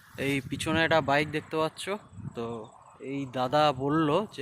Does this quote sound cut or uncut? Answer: uncut